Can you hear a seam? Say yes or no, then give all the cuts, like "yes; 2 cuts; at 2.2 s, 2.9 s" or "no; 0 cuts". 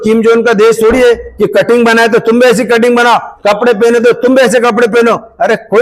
no; 0 cuts